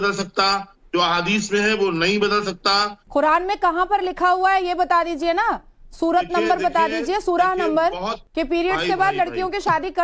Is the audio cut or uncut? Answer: cut